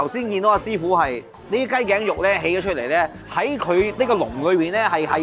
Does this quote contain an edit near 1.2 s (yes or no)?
no